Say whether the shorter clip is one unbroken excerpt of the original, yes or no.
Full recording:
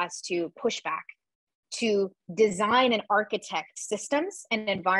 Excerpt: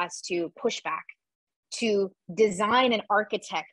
yes